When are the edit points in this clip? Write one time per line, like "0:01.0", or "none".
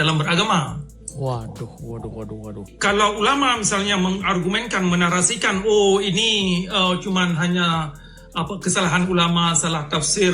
0:02.6